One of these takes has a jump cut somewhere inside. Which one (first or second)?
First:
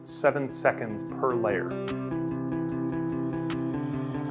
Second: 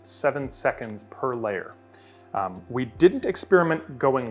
first